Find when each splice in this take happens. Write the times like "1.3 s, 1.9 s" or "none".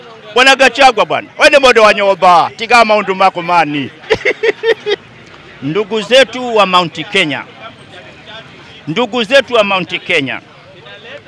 5.0 s

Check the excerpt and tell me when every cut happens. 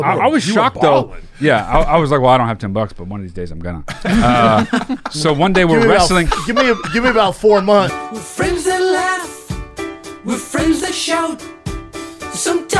7.9 s

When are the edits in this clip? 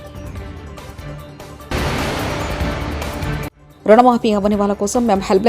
1.7 s, 3.6 s

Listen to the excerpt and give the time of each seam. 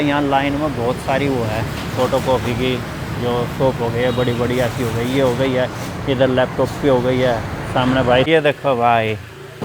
8.3 s

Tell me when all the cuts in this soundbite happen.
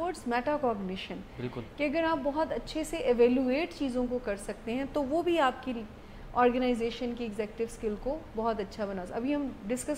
none

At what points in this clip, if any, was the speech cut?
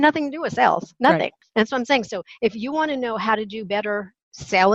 1.3 s

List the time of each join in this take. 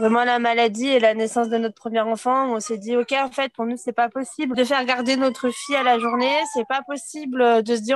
4.5 s

